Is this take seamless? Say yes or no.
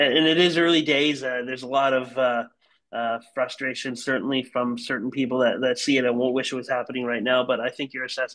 yes